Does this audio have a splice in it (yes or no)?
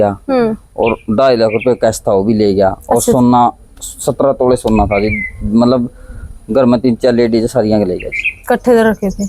no